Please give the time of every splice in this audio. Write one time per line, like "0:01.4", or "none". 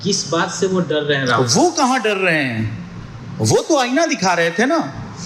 none